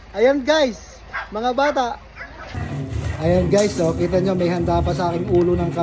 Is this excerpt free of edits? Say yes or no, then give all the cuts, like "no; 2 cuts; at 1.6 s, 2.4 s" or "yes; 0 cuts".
no; 1 cut; at 2.6 s